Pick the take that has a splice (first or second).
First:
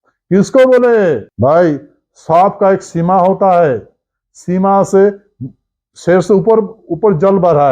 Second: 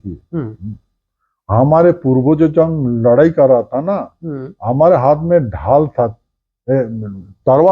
first